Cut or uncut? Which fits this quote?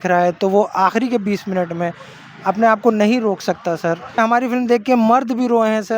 cut